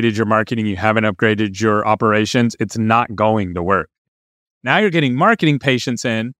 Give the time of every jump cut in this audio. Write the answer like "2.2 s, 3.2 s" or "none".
4.1 s